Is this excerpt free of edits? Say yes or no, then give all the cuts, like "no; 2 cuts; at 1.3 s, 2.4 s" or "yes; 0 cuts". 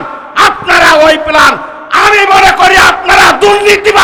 yes; 0 cuts